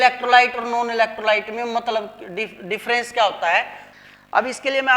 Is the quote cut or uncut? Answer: cut